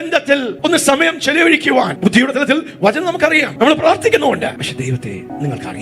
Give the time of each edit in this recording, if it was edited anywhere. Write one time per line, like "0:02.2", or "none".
0:01.9
0:03.5
0:04.8